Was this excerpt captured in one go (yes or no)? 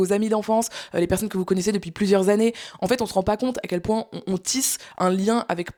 yes